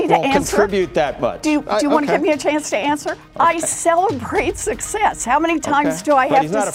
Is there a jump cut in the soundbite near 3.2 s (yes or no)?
yes